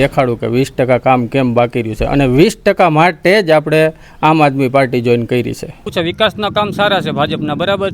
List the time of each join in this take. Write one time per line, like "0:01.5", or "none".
0:05.9